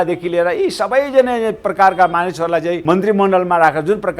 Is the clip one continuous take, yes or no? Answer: no